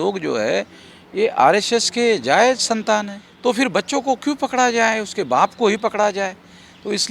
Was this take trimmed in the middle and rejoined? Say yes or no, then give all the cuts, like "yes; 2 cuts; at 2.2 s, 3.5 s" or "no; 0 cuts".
yes; 1 cut; at 3.2 s